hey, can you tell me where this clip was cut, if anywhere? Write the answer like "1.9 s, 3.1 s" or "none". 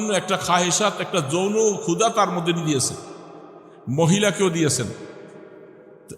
none